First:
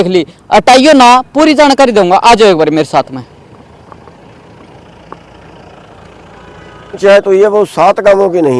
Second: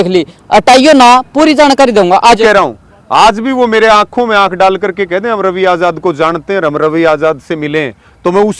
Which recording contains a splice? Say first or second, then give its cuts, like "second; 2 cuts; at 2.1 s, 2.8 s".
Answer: second; 1 cut; at 2.2 s